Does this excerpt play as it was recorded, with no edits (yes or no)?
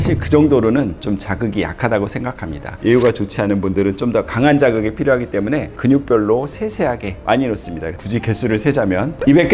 no